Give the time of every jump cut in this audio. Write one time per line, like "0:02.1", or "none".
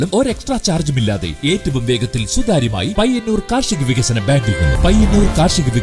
0:04.7